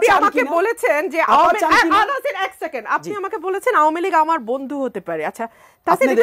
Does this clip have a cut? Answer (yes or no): no